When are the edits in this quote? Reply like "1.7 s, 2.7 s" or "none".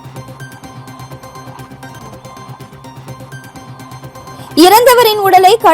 2.2 s